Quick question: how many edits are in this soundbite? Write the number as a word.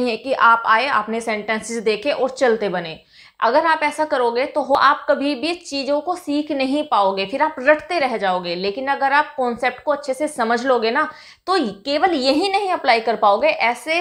one